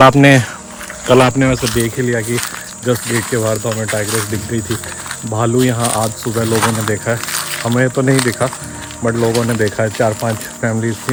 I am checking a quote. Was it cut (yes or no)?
no